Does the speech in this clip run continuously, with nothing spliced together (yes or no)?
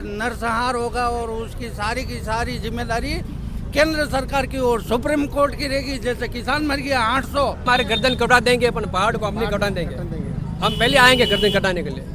yes